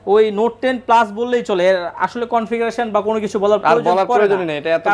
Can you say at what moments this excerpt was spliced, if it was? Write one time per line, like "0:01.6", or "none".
none